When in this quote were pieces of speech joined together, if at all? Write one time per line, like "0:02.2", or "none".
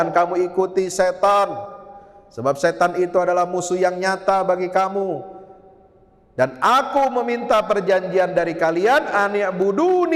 none